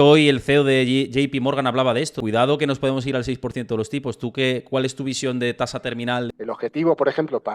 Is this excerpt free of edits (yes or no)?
no